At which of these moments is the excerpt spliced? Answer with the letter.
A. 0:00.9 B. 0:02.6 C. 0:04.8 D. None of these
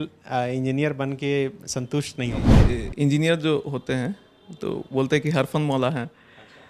B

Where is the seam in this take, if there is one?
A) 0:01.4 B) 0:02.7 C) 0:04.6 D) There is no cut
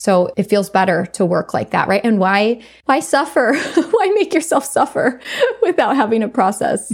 D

